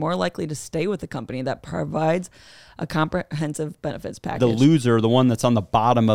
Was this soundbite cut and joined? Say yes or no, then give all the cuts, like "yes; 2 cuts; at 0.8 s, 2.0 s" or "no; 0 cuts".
yes; 1 cut; at 4.4 s